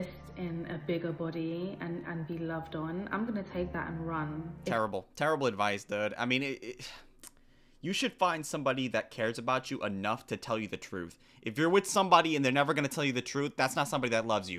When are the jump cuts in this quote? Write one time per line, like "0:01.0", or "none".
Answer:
none